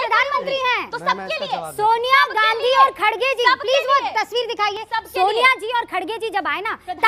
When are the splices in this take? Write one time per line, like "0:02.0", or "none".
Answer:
none